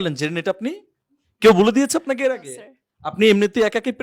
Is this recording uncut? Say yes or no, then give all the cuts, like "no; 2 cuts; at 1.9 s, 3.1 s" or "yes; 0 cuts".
yes; 0 cuts